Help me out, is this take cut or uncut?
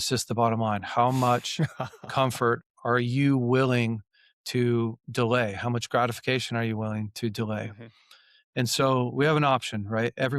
uncut